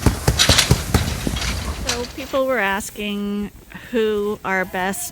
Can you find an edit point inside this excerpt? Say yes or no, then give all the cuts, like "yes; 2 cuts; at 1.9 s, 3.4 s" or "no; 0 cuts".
yes; 1 cut; at 1.8 s